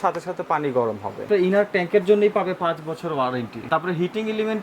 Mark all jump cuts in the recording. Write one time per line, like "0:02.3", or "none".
0:01.3
0:03.6